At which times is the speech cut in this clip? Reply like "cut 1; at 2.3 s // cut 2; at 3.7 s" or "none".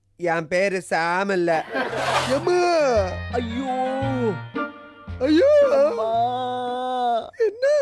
cut 1; at 2.1 s